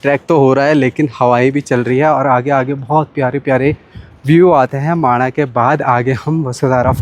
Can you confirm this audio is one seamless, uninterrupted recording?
yes; 0 cuts

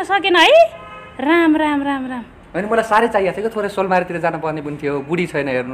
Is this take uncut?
yes; 0 cuts

